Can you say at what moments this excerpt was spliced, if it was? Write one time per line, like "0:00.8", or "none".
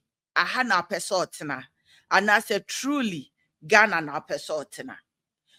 none